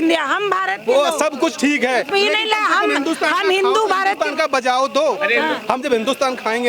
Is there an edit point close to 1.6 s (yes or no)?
no